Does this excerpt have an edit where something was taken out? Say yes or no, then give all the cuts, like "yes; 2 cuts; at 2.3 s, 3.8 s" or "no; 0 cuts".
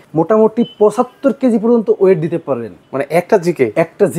no; 0 cuts